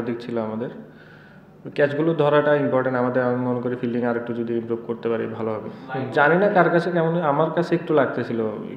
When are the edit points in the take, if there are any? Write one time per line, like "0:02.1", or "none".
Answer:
0:05.8